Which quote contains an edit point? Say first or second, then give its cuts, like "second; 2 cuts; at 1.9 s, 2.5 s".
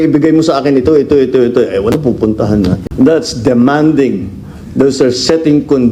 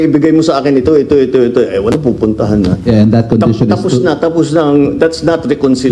first; 1 cut; at 2.8 s